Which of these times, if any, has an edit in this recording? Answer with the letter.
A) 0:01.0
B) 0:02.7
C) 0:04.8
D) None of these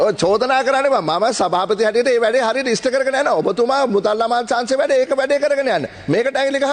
D